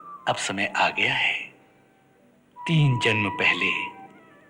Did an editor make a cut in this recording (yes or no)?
yes